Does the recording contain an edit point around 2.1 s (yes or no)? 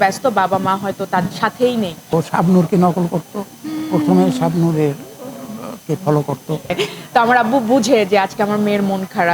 yes